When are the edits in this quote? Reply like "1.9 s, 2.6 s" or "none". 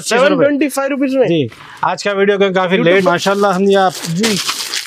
3.1 s